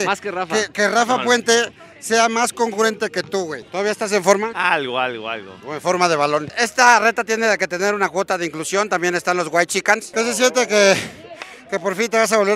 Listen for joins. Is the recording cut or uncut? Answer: cut